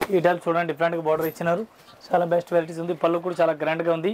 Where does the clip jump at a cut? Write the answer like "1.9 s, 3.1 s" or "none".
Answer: none